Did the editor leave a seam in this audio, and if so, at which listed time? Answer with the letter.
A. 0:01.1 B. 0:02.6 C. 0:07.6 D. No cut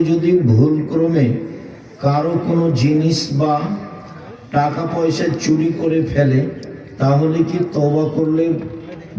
D